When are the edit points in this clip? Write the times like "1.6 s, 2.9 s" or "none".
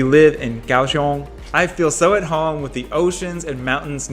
1.4 s